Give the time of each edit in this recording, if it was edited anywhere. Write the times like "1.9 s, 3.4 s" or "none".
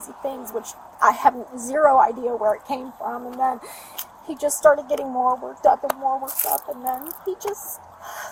none